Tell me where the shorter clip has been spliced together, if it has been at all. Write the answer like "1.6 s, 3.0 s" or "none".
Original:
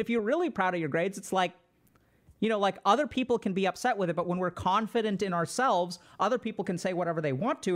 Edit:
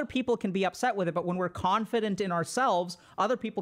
none